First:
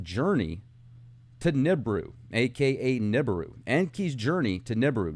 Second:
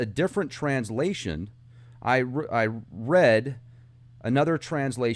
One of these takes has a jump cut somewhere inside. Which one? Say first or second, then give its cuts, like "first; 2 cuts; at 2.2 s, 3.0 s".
first; 1 cut; at 2.7 s